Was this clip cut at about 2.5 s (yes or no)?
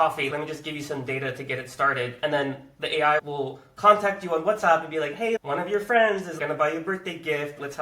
no